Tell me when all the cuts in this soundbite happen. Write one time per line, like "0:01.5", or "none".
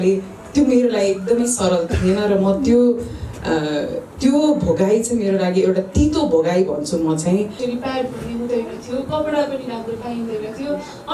0:07.6